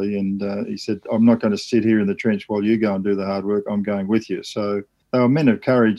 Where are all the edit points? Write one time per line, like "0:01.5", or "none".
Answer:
0:04.9